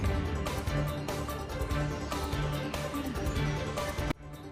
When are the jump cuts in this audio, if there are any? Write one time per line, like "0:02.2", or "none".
none

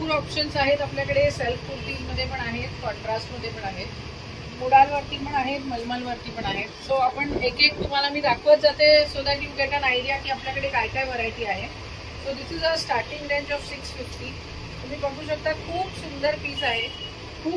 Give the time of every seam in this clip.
none

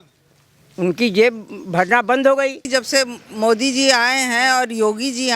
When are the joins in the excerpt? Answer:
0:02.7

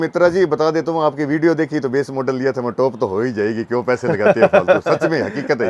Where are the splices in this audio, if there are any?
none

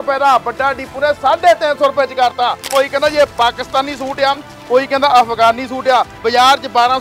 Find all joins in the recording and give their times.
0:02.7
0:06.2

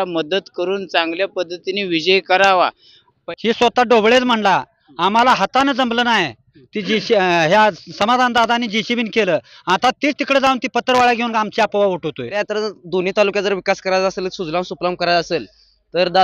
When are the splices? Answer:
0:03.2
0:12.4

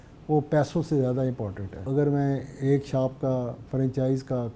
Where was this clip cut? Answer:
0:01.9

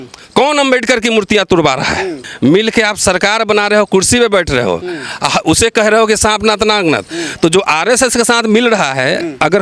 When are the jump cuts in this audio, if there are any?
0:02.2

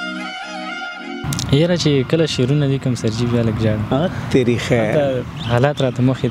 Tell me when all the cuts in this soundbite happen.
0:01.3

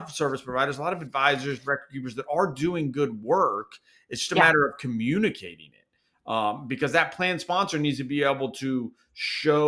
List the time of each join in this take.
none

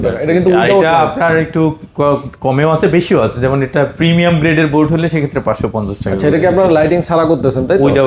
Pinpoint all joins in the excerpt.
none

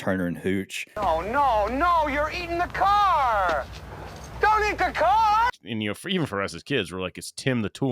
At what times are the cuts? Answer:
0:00.9
0:05.5

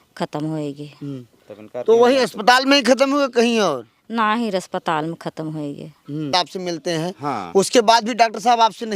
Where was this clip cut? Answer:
0:06.3

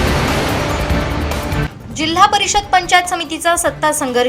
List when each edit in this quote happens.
0:01.5

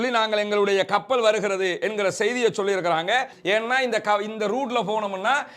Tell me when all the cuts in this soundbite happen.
0:03.3

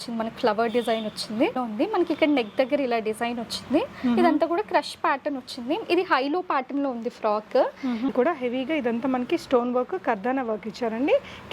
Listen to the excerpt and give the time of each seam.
0:01.6
0:08.1

